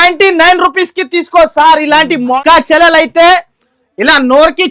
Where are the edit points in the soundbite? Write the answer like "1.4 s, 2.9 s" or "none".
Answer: 2.4 s